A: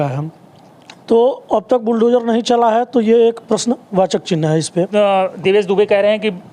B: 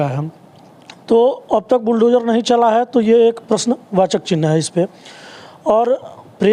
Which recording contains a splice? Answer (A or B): A